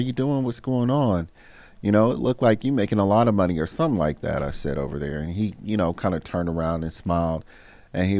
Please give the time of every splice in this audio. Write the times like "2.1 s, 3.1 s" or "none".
none